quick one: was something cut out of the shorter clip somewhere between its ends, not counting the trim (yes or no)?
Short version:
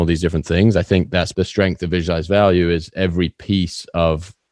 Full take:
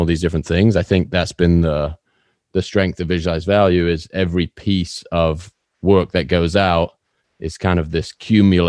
yes